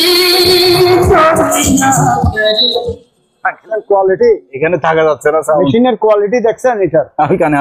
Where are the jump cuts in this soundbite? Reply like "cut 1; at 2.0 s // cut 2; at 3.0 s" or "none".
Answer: none